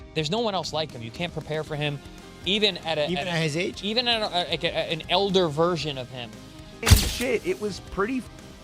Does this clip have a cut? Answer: yes; 1 cut; at 6.8 s

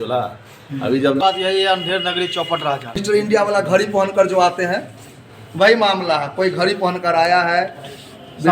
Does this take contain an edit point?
yes; 2 cuts; at 1.2 s, 3.0 s

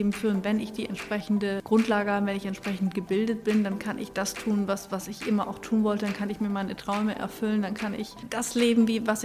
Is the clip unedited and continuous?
no; 2 cuts; at 1.6 s, 8.2 s

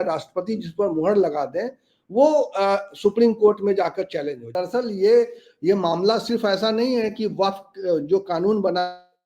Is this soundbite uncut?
no; 1 cut; at 4.6 s

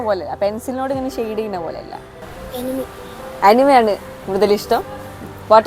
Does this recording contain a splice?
yes; 1 cut; at 2.5 s

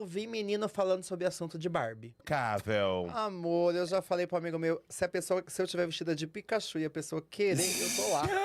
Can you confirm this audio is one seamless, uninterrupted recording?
no; 1 cut; at 2.2 s

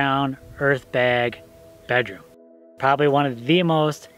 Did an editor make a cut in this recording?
yes; 1 cut; at 2.6 s

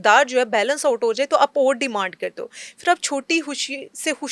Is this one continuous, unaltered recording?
yes; 0 cuts

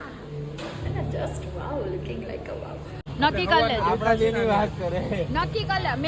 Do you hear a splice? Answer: yes; 1 cut; at 3.0 s

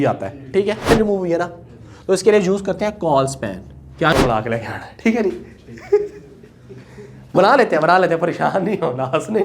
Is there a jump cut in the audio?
yes; 2 cuts; at 0.9 s, 4.1 s

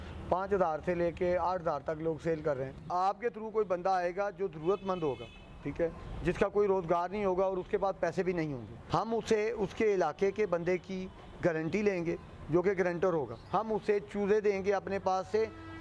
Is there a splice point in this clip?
yes; 3 cuts; at 2.8 s, 8.8 s, 13.4 s

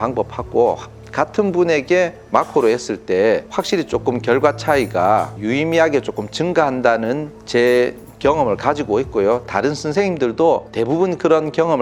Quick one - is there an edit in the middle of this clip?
no; 0 cuts

